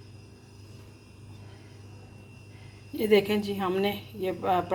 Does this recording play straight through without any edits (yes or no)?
yes